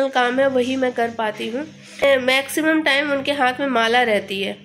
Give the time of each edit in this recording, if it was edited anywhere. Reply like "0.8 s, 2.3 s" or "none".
2.0 s

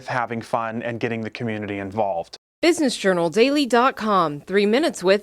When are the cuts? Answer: 2.4 s

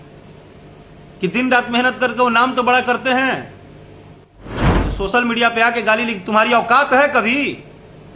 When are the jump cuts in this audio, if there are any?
4.4 s

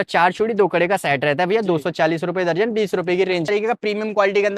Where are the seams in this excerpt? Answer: 3.5 s

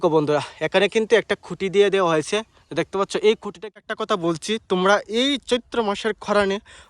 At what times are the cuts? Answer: 3.8 s

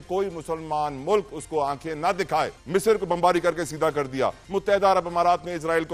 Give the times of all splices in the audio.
2.6 s, 4.4 s

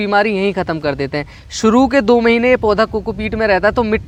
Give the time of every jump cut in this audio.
none

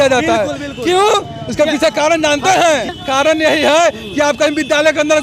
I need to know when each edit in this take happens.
2.9 s

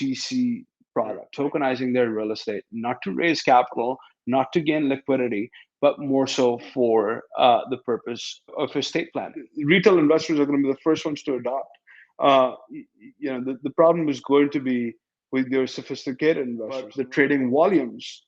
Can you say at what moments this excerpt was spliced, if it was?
1.3 s, 9.4 s, 16.9 s

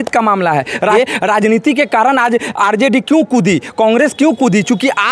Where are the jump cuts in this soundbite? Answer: 0.9 s

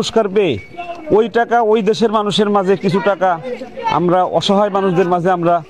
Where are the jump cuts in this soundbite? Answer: none

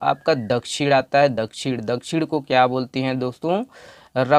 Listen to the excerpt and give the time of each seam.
none

